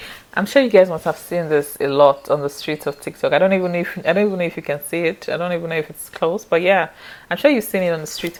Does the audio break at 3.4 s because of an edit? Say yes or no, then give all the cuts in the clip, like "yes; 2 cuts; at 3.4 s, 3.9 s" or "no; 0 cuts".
no; 0 cuts